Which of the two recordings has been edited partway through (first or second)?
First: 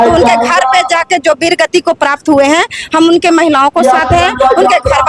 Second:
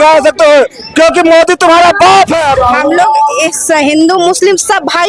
second